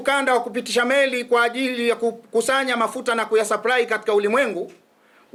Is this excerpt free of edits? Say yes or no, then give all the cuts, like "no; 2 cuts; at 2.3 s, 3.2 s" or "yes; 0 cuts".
yes; 0 cuts